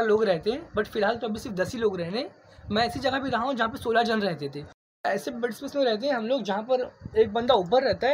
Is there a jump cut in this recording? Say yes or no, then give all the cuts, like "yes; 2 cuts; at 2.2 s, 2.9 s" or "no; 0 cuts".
yes; 1 cut; at 5.0 s